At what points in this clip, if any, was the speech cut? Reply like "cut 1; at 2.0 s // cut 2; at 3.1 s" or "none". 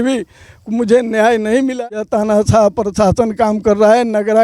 cut 1; at 2.1 s